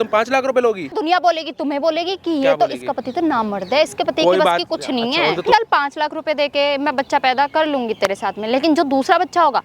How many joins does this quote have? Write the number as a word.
two